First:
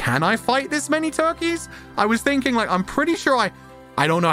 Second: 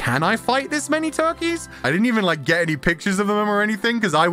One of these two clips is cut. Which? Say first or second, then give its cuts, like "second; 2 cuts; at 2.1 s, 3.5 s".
second; 1 cut; at 1.8 s